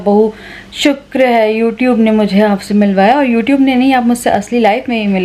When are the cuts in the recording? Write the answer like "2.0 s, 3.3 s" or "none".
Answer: none